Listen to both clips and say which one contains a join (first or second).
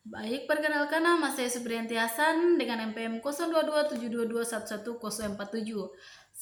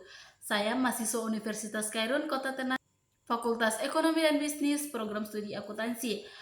second